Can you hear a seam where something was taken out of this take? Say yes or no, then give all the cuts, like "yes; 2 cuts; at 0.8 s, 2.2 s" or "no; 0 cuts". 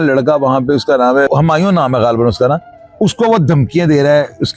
no; 0 cuts